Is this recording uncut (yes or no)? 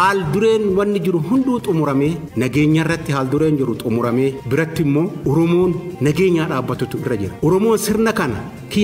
no